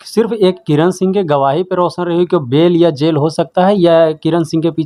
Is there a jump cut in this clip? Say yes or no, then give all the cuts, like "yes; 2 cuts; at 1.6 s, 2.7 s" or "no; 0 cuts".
no; 0 cuts